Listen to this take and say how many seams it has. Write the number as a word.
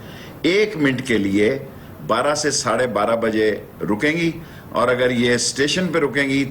zero